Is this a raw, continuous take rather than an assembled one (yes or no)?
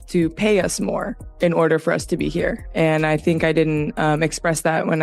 yes